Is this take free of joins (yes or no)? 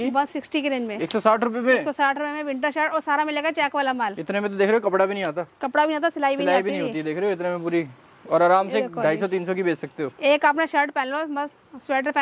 yes